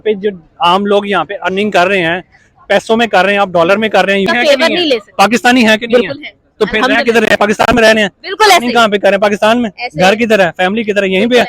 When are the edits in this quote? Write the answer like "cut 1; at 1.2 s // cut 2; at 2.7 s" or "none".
cut 1; at 4.3 s